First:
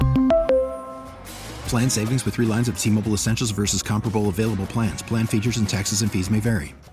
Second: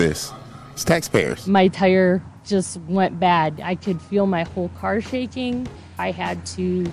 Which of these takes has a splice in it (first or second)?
second